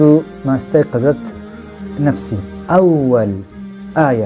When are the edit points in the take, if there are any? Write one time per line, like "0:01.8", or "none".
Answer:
0:02.6

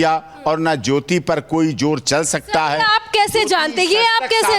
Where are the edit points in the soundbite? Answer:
none

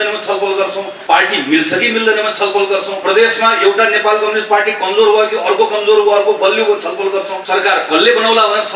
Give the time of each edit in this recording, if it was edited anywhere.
0:00.9
0:02.9
0:07.4

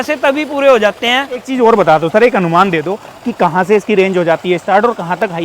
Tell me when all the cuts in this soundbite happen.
0:01.5

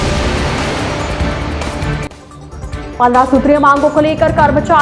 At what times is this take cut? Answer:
none

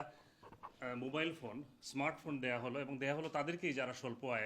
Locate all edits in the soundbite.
none

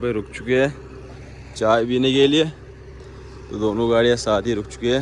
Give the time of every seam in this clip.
none

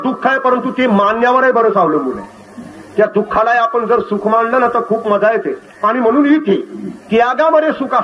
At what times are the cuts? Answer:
none

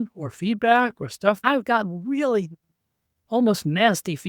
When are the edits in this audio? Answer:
0:01.4

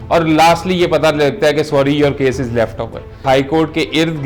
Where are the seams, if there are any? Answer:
0:03.2

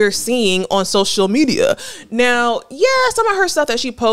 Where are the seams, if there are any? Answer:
none

